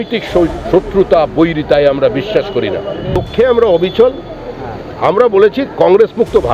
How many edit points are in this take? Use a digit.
1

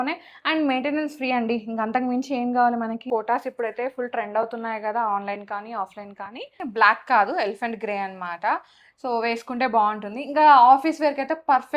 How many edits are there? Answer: 2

